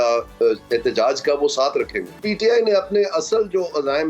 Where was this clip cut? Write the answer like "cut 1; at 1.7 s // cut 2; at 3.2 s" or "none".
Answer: cut 1; at 2.2 s